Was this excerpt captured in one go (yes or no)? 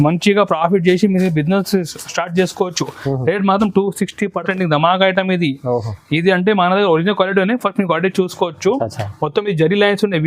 no